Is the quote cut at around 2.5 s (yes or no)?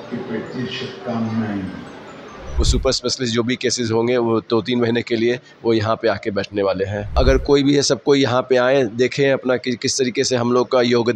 yes